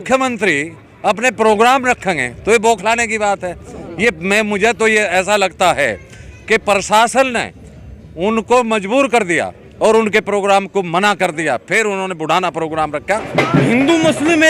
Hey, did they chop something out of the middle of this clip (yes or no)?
yes